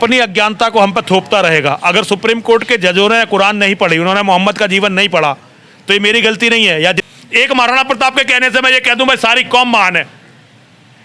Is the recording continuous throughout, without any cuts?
no; 1 cut; at 7.0 s

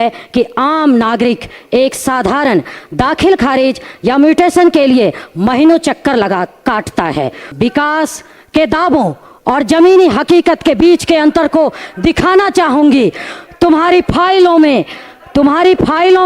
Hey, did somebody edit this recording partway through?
yes; 1 cut; at 7.4 s

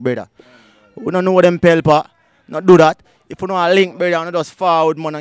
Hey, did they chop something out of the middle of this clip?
no; 0 cuts

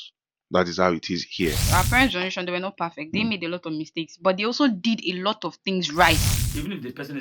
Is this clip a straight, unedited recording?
no; 2 cuts; at 1.6 s, 6.3 s

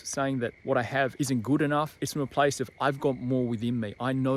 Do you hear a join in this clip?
yes; 2 cuts; at 0.8 s, 2.0 s

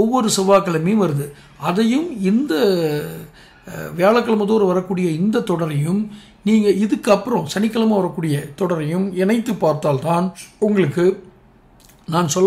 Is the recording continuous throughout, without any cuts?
no; 1 cut; at 10.4 s

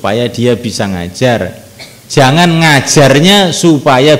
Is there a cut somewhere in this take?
no; 0 cuts

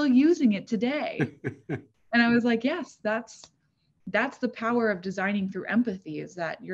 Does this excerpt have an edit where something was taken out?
no; 0 cuts

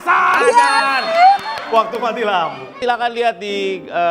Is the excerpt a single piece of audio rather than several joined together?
no; 1 cut; at 2.7 s

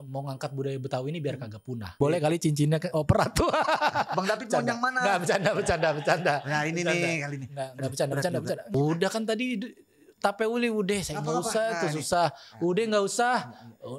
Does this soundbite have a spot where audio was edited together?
yes; 2 cuts; at 2.0 s, 8.7 s

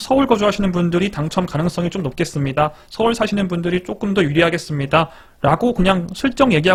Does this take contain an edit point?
no; 0 cuts

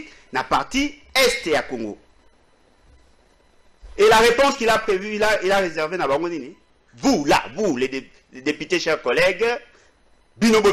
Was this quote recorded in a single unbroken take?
yes; 0 cuts

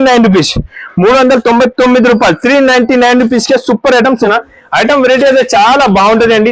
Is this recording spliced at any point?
yes; 1 cut; at 4.2 s

